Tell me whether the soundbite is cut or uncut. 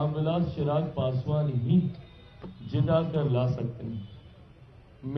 uncut